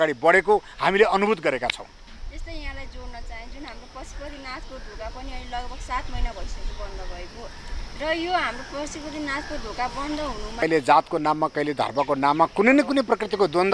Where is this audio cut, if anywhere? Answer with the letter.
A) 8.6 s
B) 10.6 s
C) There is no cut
B